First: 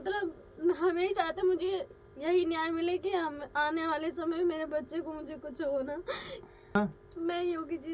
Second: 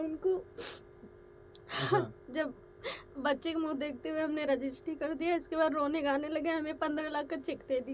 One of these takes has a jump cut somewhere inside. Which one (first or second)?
first